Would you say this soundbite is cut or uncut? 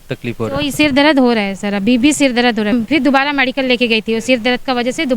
cut